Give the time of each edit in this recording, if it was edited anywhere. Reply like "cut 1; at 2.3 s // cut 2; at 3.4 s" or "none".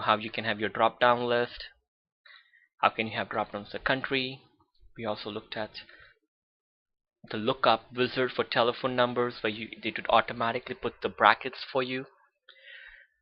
cut 1; at 2.5 s